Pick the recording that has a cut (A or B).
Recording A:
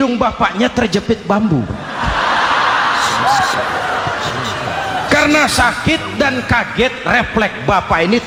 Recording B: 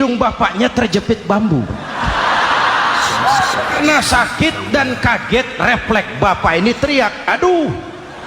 B